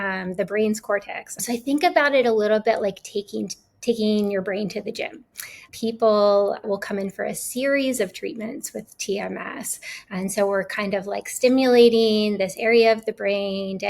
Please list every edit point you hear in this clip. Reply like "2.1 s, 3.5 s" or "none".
1.4 s, 5.7 s, 6.6 s